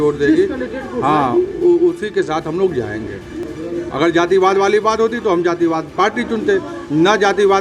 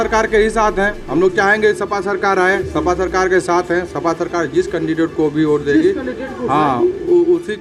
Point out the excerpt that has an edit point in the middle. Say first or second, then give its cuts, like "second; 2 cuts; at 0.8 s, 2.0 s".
first; 1 cut; at 3.4 s